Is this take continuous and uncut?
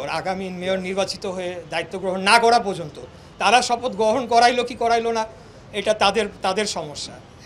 yes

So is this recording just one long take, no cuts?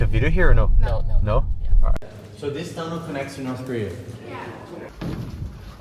no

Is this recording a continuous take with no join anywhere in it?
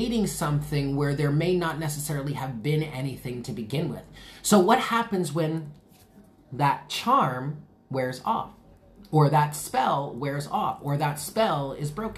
yes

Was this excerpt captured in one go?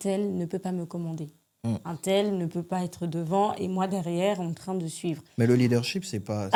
yes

